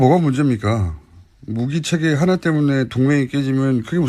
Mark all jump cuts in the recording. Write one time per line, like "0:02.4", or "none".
0:01.1